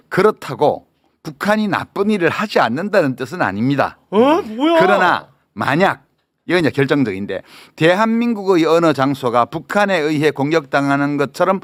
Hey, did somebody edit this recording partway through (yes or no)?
no